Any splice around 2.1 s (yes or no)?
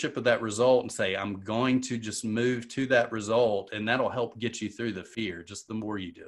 no